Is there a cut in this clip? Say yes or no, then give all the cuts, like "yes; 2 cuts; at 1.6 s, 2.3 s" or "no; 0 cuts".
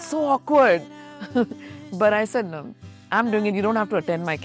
no; 0 cuts